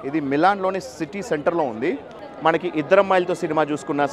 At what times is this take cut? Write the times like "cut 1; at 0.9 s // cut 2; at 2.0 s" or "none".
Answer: cut 1; at 2.2 s

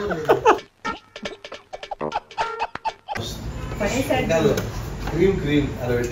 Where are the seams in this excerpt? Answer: none

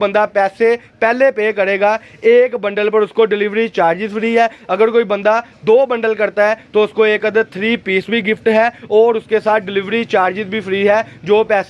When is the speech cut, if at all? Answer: none

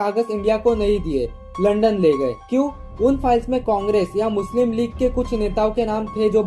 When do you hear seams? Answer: none

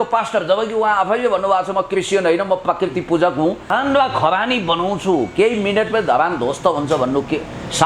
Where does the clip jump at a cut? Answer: cut 1; at 3.7 s

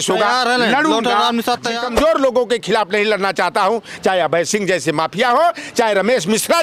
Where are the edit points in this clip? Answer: cut 1; at 1.8 s

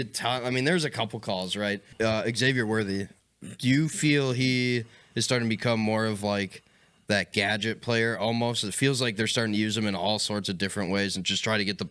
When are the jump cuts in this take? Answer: cut 1; at 1.9 s

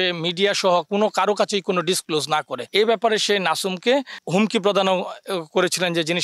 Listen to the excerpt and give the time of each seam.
cut 1; at 2.6 s

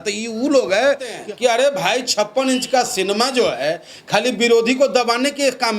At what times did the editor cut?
cut 1; at 1.2 s

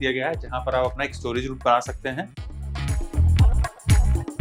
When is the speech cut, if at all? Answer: cut 1; at 2.5 s

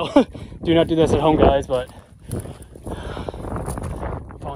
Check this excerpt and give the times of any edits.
none

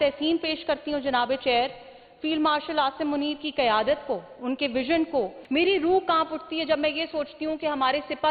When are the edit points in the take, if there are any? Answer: cut 1; at 5.4 s

